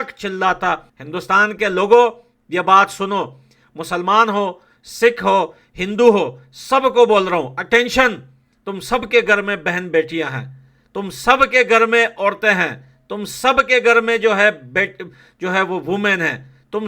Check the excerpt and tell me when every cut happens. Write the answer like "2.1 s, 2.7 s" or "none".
1.0 s